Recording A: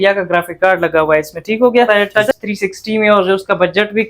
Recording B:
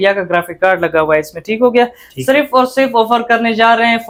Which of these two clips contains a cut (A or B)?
A